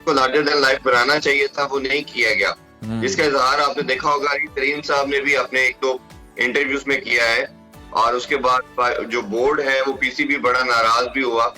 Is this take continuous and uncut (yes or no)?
yes